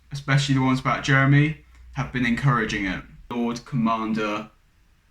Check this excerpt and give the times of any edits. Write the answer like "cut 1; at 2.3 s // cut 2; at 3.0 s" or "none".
cut 1; at 3.3 s